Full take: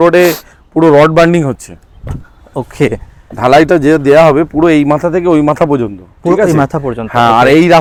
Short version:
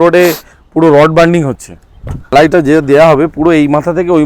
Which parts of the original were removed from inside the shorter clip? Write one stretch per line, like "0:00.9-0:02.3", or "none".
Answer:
0:02.3-0:03.5